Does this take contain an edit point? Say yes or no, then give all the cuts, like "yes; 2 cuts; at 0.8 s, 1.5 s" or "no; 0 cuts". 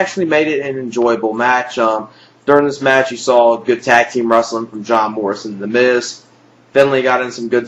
yes; 1 cut; at 3.1 s